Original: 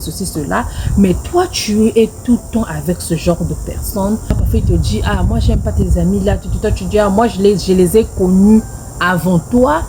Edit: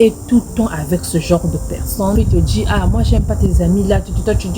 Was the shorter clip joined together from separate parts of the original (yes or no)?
yes